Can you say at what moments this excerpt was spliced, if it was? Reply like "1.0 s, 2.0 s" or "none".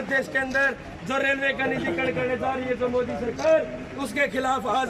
none